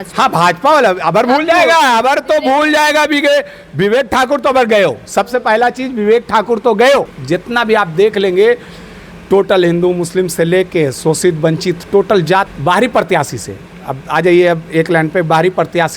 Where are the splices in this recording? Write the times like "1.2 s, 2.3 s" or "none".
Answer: 7.2 s, 12.5 s